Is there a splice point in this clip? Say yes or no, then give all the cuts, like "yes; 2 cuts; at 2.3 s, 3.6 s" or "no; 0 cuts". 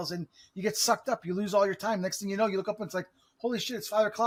no; 0 cuts